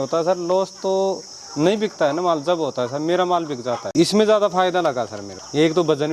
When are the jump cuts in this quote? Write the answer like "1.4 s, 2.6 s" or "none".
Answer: 3.9 s